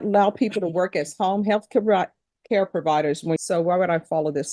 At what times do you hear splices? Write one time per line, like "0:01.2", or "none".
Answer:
0:03.4